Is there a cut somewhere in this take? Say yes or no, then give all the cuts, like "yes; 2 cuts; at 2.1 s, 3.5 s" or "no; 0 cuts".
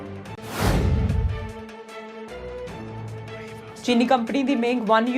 yes; 1 cut; at 3.6 s